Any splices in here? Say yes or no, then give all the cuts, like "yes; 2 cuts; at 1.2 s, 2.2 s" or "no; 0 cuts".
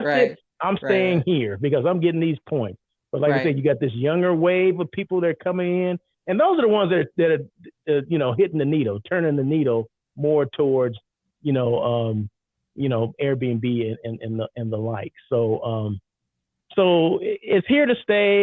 no; 0 cuts